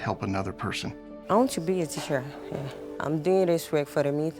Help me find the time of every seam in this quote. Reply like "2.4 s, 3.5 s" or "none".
1.1 s, 2.8 s